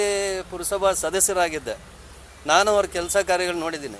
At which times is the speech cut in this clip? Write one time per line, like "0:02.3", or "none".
none

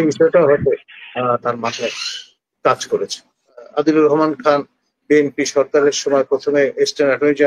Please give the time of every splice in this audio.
0:03.7

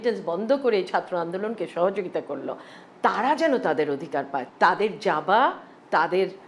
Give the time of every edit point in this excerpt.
none

